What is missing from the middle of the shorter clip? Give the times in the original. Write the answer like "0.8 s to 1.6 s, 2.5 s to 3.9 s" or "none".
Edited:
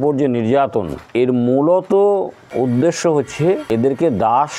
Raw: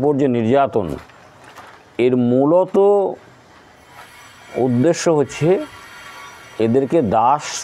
1.0 s to 1.8 s, 3.2 s to 4.4 s, 5.8 s to 6.7 s